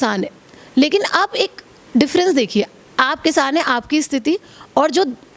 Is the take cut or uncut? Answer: uncut